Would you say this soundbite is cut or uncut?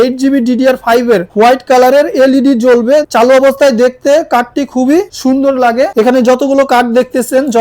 cut